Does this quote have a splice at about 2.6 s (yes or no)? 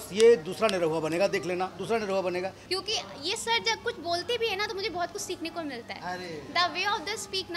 yes